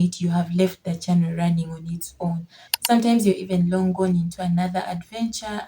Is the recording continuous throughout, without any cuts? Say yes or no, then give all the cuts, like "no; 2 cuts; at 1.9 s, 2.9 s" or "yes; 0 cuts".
no; 1 cut; at 2.6 s